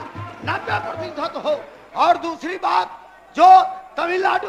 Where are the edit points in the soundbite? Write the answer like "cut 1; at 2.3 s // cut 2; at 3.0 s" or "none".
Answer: none